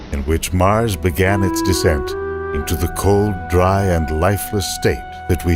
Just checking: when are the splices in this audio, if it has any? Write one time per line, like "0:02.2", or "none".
0:03.6